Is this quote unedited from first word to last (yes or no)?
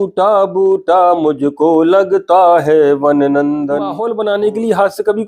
no